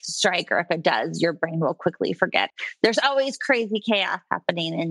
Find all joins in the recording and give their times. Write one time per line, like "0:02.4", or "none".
0:02.5